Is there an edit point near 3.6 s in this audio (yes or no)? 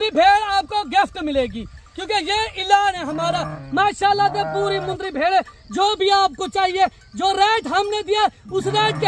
yes